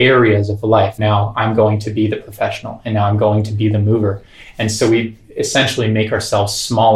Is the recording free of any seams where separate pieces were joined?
no; 1 cut; at 1.0 s

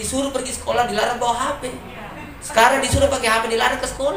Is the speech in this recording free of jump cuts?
yes; 0 cuts

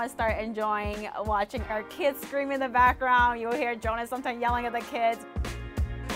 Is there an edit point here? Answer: yes; 1 cut; at 5.2 s

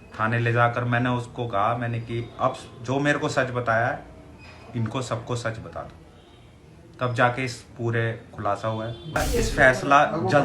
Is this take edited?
yes; 1 cut; at 9.2 s

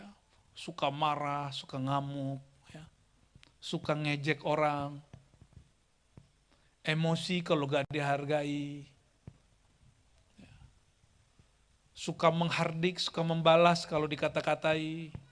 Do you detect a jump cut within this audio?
no; 0 cuts

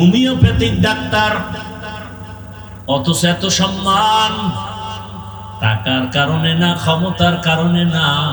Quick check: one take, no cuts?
yes; 0 cuts

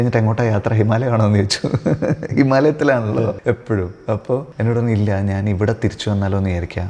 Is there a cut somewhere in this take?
yes; 2 cuts; at 3.4 s, 4.5 s

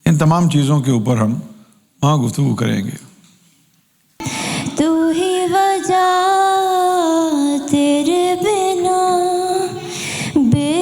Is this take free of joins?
no; 1 cut; at 4.3 s

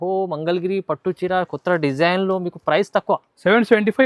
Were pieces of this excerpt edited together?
no; 0 cuts

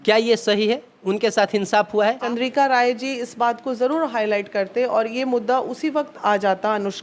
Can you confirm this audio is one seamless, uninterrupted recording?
no; 1 cut; at 2.2 s

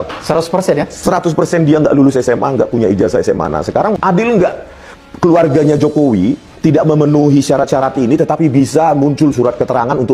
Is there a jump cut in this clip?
yes; 1 cut; at 4.0 s

